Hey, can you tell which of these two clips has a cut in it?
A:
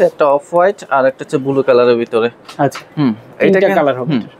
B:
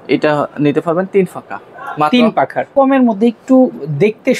B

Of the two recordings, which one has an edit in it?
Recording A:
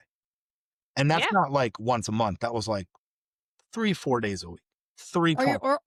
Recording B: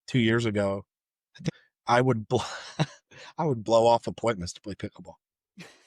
B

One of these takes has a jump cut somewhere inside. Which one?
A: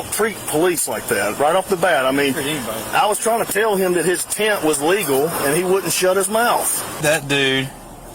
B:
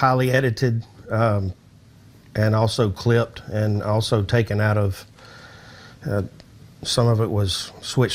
A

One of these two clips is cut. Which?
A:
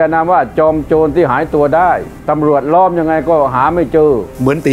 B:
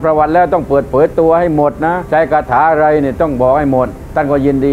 B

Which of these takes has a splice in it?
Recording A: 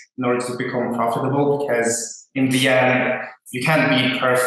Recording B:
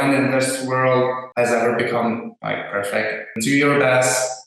B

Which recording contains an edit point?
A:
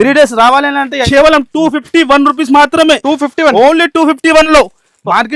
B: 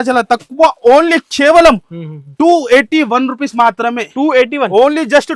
A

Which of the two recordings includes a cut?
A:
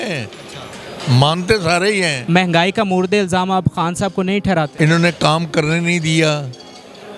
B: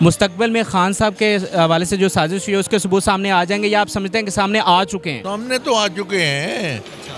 A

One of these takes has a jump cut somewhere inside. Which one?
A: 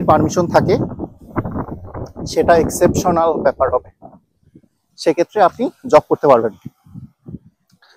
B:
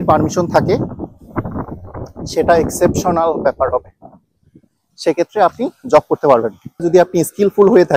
B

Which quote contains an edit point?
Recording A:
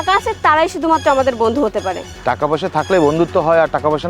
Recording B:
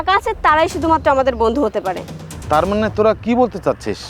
A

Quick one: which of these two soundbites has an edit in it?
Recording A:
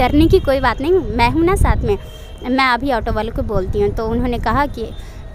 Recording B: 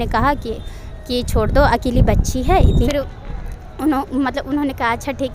B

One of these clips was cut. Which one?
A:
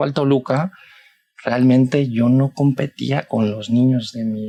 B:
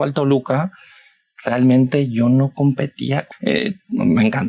B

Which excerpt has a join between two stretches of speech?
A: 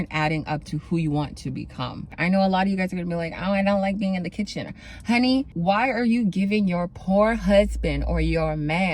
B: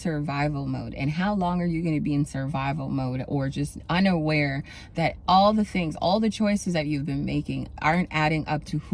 A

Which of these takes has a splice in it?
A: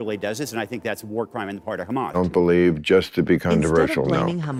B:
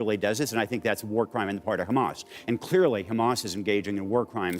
B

